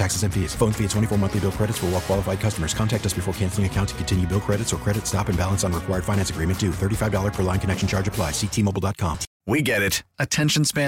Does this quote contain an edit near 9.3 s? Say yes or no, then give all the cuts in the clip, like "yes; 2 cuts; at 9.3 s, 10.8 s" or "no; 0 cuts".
yes; 1 cut; at 9.3 s